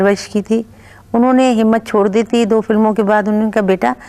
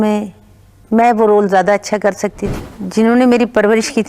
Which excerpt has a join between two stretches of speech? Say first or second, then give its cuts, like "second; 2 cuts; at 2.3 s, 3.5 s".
second; 1 cut; at 2.4 s